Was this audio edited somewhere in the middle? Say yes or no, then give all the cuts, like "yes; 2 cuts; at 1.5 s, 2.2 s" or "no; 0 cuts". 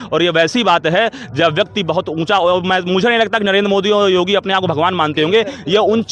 no; 0 cuts